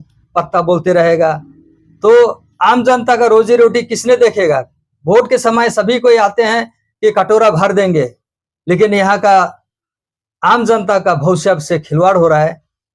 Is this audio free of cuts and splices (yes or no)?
yes